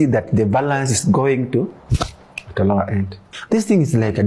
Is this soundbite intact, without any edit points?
no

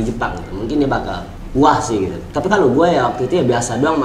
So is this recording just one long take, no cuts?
yes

